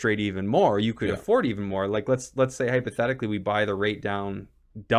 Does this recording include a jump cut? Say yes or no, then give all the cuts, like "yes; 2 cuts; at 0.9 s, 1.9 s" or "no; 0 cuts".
no; 0 cuts